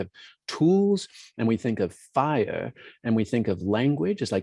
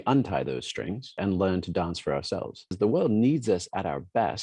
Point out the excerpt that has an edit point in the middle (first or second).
second